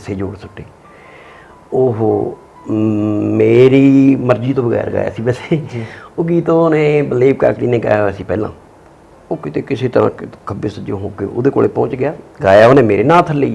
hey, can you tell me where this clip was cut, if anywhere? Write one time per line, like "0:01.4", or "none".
none